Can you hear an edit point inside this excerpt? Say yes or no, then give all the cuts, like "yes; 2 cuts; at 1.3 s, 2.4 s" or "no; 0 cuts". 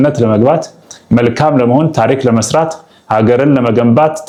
no; 0 cuts